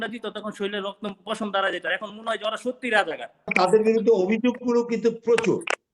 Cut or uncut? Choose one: cut